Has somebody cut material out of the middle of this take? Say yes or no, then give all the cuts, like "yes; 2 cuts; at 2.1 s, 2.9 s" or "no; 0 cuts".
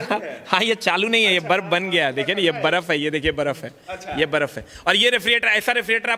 no; 0 cuts